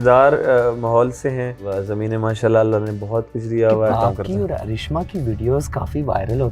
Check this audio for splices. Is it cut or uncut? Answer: cut